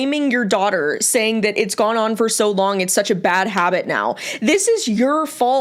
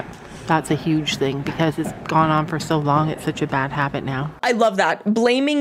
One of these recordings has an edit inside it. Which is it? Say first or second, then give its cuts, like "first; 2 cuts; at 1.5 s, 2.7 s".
second; 1 cut; at 4.3 s